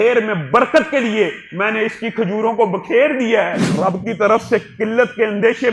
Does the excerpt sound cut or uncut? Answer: cut